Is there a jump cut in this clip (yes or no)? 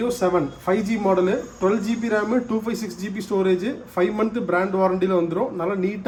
no